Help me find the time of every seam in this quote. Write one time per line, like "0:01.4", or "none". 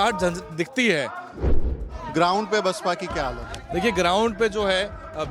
0:01.5